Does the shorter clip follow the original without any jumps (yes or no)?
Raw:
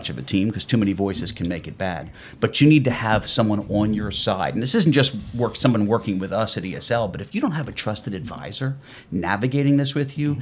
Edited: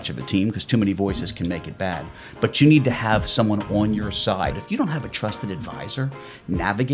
no